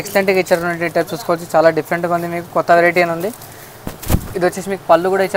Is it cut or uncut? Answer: uncut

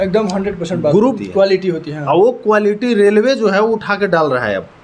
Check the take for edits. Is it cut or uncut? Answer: cut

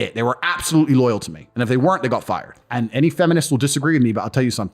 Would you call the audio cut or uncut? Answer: cut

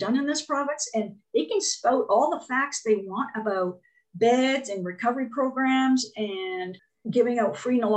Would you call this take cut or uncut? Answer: cut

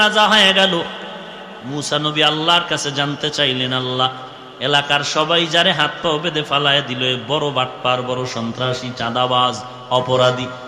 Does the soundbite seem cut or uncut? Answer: uncut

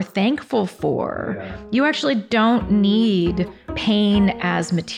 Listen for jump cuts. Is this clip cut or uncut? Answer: cut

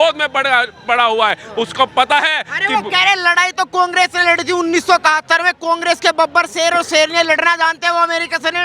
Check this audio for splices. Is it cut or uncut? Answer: uncut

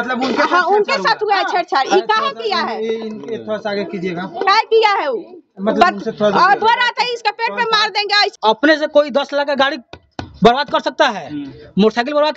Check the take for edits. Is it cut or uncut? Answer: cut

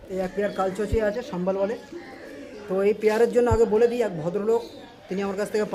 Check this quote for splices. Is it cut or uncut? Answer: uncut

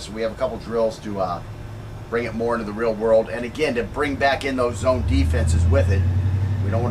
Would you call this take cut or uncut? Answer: cut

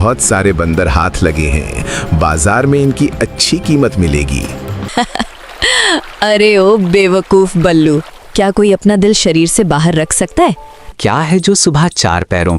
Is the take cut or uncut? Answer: cut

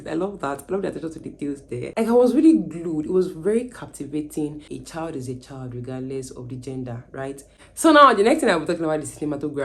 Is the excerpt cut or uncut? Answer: cut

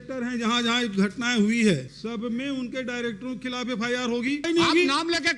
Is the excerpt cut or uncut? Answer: cut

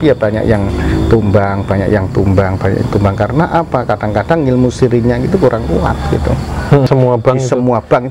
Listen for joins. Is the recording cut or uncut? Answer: cut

